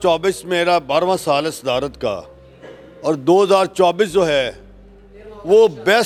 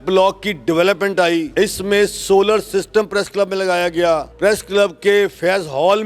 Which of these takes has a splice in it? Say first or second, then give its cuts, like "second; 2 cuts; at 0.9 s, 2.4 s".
second; 2 cuts; at 1.5 s, 4.3 s